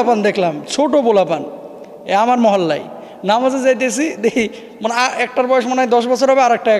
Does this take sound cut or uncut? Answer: uncut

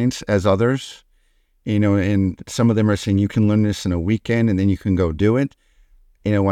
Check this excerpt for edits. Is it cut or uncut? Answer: uncut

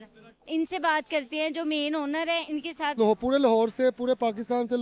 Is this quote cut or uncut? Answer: cut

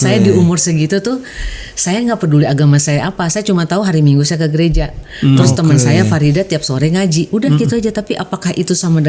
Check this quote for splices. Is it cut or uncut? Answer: uncut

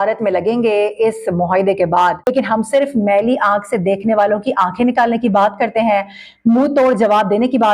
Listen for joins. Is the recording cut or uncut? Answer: cut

